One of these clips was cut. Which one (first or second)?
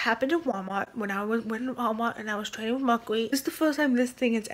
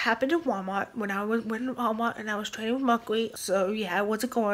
first